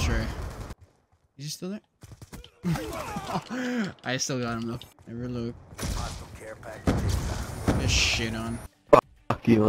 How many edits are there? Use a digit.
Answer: 2